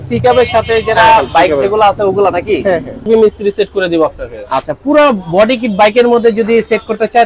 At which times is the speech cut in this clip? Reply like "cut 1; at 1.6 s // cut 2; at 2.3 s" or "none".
cut 1; at 3.1 s